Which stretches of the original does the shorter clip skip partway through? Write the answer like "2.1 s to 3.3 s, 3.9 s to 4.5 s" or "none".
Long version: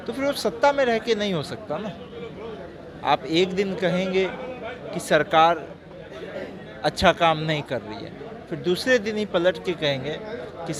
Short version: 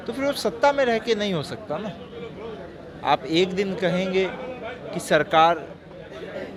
none